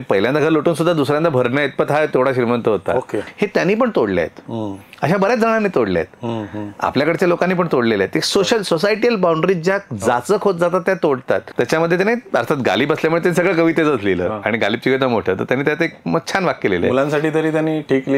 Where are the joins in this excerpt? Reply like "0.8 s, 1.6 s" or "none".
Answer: 3.2 s, 11.5 s

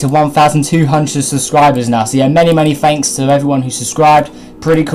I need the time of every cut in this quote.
1.5 s

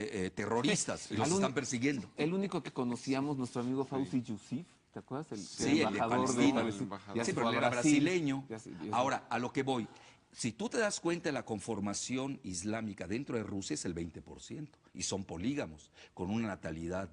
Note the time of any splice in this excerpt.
9.2 s

